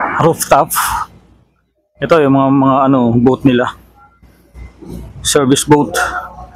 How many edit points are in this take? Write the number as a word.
zero